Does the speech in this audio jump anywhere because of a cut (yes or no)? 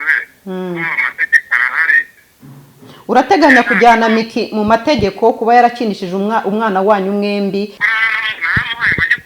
yes